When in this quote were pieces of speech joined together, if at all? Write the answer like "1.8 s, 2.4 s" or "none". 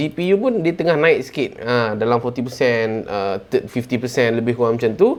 none